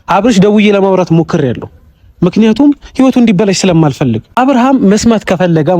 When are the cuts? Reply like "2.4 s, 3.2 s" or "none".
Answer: 4.3 s